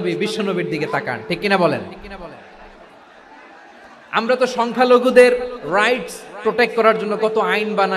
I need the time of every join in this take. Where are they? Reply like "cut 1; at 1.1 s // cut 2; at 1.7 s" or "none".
none